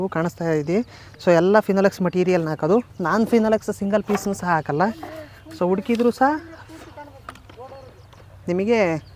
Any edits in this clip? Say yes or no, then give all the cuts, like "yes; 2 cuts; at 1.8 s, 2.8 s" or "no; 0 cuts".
no; 0 cuts